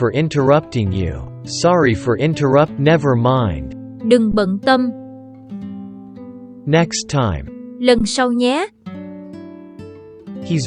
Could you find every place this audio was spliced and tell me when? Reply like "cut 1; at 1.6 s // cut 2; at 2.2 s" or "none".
cut 1; at 1.4 s